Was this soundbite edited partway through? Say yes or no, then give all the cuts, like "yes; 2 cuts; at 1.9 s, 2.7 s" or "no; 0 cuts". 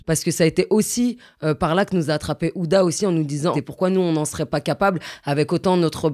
yes; 1 cut; at 3.5 s